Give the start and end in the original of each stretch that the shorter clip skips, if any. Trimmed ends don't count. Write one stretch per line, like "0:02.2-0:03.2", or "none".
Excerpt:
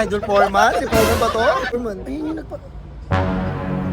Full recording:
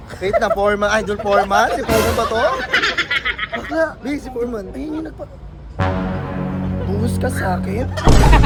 0:02.7-0:04.4